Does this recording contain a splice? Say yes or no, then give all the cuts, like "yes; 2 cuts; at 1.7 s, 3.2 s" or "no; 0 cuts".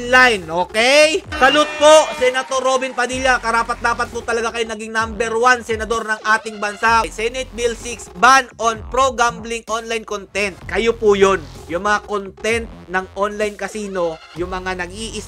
yes; 2 cuts; at 1.3 s, 7.1 s